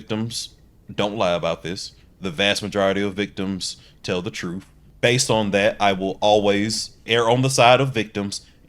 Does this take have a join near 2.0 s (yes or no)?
no